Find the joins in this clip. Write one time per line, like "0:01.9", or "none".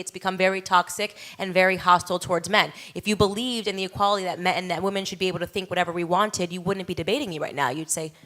0:06.6